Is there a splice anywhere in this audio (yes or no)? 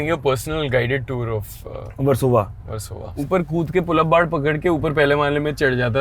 yes